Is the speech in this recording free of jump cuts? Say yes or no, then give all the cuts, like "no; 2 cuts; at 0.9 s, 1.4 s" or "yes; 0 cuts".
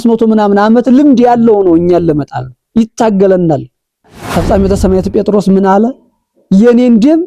no; 1 cut; at 4.1 s